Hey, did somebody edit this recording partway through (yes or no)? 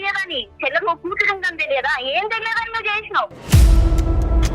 yes